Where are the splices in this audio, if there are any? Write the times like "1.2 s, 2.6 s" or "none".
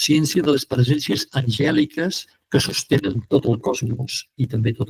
none